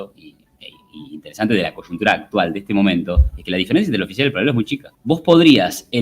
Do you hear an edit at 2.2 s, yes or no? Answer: no